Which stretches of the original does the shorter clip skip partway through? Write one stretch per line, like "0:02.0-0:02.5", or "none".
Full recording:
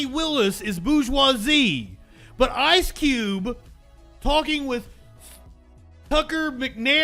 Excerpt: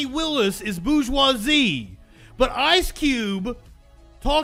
none

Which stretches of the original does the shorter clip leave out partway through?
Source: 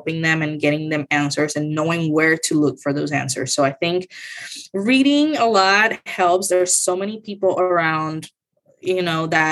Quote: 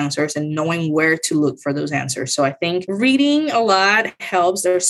0:04.1-0:04.7

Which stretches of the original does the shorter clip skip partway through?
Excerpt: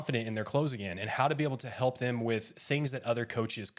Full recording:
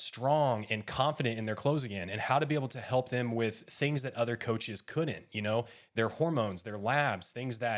none

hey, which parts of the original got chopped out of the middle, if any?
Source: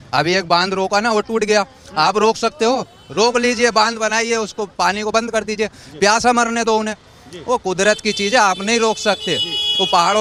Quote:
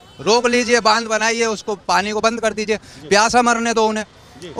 none

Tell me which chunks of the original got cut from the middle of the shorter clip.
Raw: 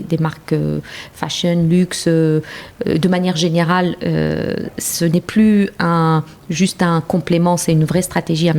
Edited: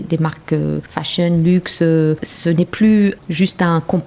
0:00.9-0:01.2
0:02.5-0:04.8
0:05.8-0:06.4

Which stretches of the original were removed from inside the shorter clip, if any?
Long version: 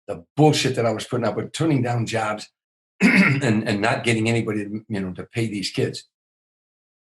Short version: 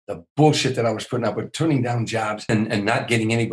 0:02.4-0:03.4

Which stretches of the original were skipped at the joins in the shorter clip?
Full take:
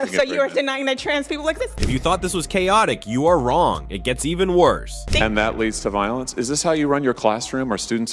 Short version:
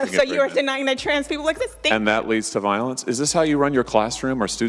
0:01.7-0:05.0

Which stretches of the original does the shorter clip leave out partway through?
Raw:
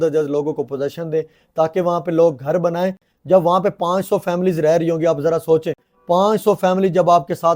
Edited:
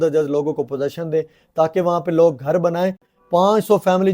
0:03.1-0:05.9

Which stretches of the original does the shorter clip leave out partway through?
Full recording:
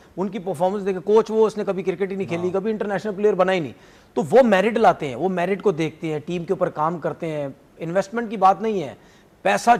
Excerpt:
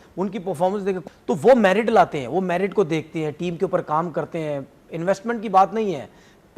0:01.0-0:03.9

